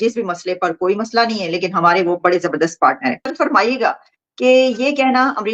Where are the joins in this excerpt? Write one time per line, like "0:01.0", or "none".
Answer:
none